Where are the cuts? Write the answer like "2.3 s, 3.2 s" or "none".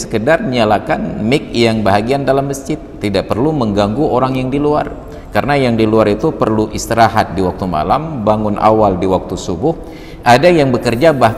none